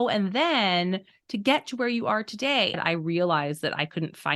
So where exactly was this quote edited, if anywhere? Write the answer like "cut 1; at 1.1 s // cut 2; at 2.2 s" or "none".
cut 1; at 2.8 s